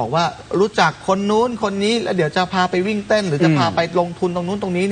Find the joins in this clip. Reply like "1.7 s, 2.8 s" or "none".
none